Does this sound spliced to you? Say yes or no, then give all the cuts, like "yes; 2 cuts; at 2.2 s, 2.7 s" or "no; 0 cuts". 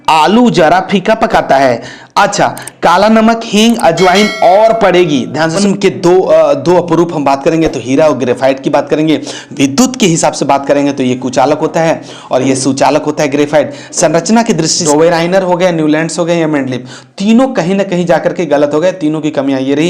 yes; 2 cuts; at 5.6 s, 14.8 s